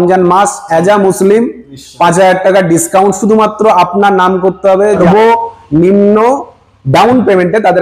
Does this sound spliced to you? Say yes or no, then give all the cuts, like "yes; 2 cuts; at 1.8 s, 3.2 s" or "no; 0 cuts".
yes; 1 cut; at 5.0 s